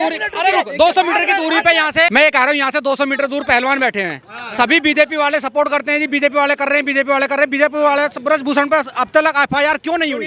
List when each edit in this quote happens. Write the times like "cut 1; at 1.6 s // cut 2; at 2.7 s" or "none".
none